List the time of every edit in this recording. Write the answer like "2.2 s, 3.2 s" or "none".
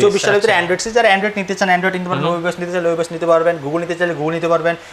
none